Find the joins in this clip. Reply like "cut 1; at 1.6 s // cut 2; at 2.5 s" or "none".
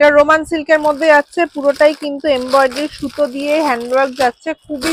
none